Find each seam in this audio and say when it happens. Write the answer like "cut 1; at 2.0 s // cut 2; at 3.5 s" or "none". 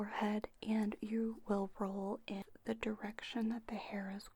cut 1; at 2.4 s